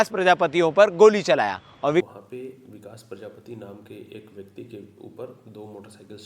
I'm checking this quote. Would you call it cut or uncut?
cut